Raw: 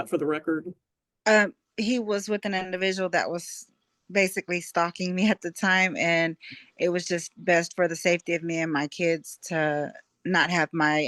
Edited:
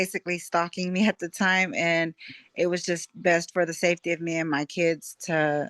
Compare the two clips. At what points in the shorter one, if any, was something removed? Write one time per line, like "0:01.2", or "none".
none